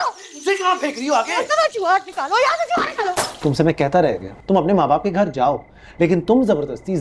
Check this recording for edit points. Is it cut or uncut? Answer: cut